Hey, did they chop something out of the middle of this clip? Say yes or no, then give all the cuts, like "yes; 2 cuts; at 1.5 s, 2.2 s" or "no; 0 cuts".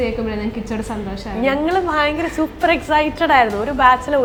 no; 0 cuts